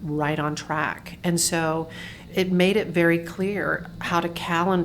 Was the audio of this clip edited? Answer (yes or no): yes